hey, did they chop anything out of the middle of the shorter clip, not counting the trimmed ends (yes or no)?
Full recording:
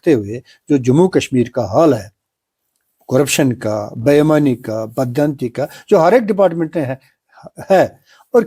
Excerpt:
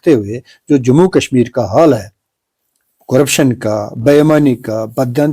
no